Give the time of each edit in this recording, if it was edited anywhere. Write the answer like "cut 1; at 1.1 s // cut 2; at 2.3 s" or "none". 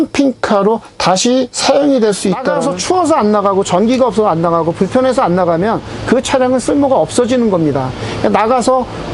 cut 1; at 2.5 s